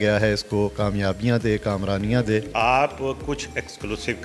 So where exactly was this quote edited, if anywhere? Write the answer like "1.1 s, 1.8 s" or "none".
2.5 s

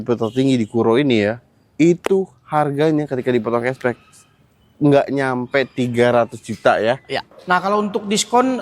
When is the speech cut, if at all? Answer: 7.3 s

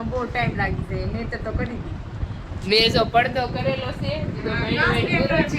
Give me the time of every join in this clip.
none

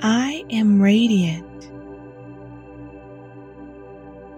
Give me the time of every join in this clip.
1.4 s

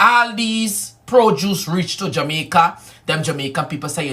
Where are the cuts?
2.9 s

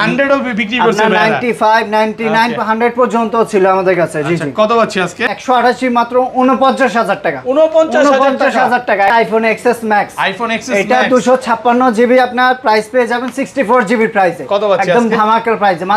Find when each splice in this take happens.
5.2 s, 9.2 s

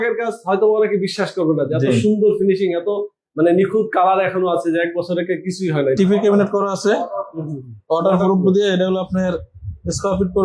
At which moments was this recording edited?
6.0 s

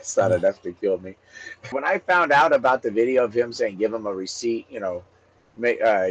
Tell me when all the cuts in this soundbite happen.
1.7 s

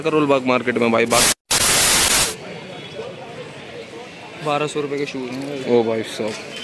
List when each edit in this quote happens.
none

